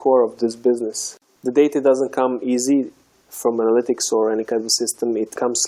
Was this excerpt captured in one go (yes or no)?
yes